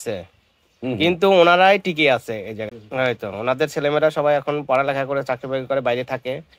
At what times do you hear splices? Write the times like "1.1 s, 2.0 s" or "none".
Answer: 2.7 s

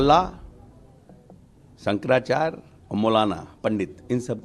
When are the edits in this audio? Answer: none

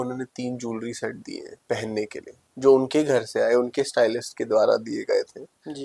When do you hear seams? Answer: 1.5 s

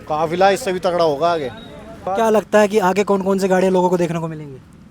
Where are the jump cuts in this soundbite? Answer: 2.1 s

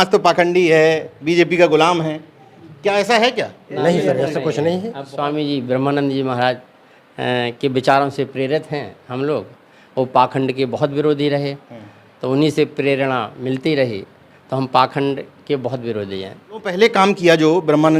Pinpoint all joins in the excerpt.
5.1 s, 16.7 s

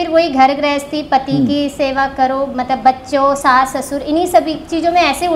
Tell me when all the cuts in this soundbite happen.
none

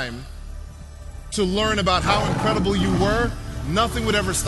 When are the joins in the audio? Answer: none

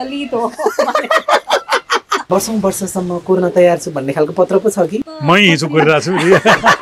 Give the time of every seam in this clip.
2.2 s, 5.0 s

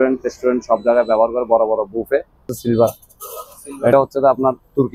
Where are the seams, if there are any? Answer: 2.5 s, 3.9 s

